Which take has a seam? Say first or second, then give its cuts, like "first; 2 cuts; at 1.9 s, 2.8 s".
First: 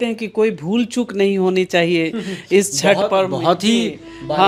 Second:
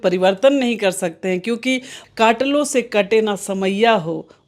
second; 1 cut; at 1.9 s